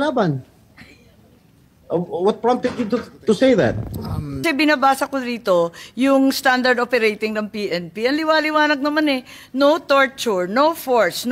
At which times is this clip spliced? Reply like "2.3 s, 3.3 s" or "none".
4.4 s